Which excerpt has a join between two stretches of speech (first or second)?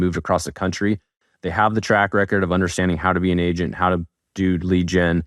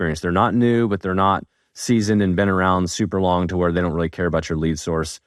first